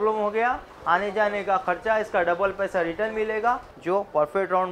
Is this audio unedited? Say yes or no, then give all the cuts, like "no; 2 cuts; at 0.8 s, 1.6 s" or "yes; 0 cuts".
no; 1 cut; at 3.7 s